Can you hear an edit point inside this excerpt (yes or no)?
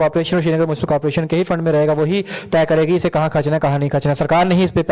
no